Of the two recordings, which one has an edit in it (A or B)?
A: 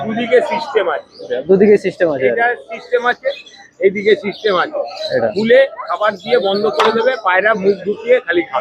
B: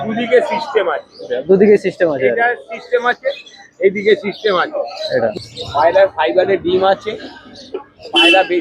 B